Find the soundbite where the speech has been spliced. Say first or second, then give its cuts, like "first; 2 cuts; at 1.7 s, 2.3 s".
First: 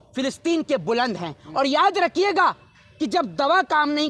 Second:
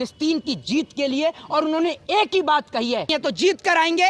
second; 1 cut; at 3.1 s